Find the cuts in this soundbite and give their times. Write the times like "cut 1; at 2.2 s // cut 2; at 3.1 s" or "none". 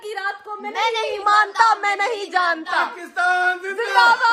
none